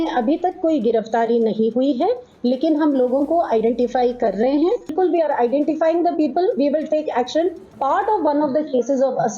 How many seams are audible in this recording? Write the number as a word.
two